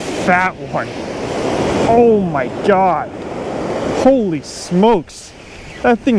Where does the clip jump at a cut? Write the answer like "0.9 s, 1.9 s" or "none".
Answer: none